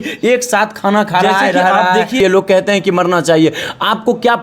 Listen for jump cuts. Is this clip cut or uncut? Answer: cut